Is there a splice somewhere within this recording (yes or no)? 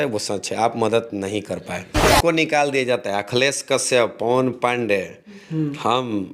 yes